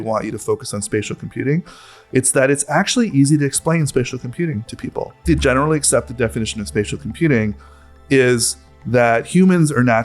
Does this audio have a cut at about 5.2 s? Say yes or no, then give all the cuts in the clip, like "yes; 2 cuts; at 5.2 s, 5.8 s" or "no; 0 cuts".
yes; 2 cuts; at 5.2 s, 8.0 s